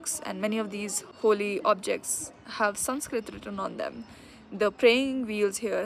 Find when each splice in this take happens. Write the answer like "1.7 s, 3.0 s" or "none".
1.0 s